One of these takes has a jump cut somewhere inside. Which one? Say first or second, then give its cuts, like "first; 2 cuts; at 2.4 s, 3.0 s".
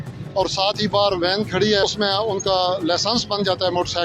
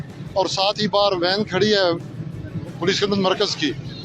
first; 1 cut; at 1.8 s